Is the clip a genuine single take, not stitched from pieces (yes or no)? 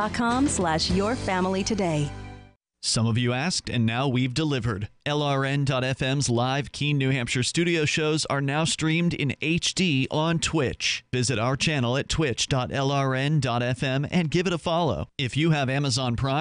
no